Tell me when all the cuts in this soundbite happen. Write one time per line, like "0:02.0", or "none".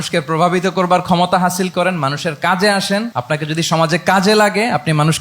0:03.1